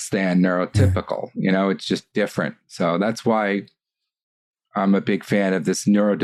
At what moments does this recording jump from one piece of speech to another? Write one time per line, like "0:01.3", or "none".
none